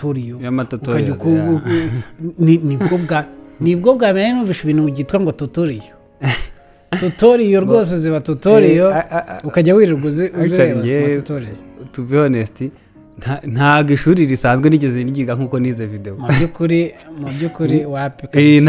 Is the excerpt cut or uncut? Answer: uncut